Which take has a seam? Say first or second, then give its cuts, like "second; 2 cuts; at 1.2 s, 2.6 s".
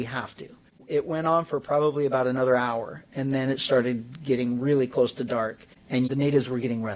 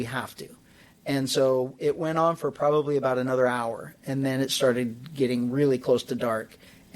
first; 2 cuts; at 0.8 s, 6.1 s